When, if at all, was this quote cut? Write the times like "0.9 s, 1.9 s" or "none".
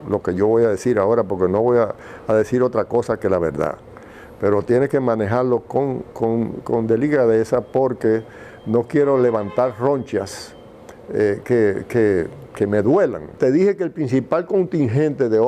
13.3 s